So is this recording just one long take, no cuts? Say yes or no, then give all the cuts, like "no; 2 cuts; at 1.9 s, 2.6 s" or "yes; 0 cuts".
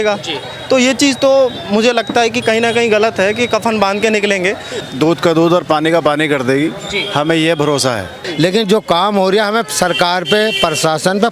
no; 2 cuts; at 4.8 s, 8.2 s